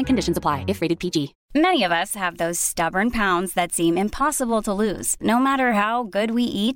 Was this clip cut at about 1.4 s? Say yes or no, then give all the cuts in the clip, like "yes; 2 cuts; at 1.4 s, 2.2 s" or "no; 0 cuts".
yes; 1 cut; at 1.4 s